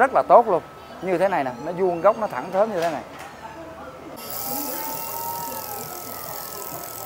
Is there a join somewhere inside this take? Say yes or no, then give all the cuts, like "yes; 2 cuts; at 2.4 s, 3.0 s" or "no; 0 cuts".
yes; 1 cut; at 4.0 s